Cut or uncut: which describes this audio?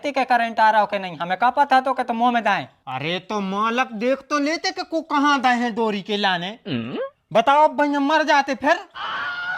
uncut